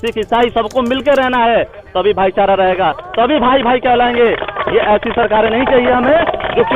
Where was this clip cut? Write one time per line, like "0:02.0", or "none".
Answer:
none